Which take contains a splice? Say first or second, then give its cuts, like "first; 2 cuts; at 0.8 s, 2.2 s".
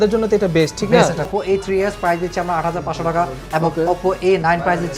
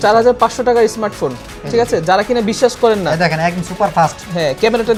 first; 1 cut; at 1.3 s